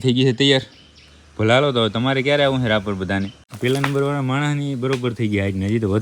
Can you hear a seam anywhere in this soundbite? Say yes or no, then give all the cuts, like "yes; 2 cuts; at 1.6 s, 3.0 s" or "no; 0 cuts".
yes; 1 cut; at 3.4 s